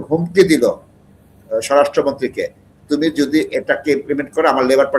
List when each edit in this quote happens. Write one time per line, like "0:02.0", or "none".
none